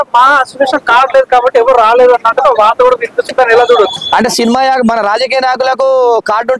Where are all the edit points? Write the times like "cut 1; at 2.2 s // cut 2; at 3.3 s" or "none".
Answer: none